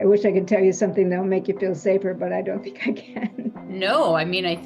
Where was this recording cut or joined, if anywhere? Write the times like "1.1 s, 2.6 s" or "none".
3.6 s